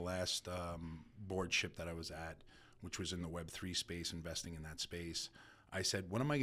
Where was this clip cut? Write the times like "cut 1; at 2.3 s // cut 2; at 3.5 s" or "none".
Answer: none